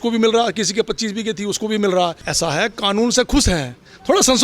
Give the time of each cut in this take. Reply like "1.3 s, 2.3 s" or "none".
2.2 s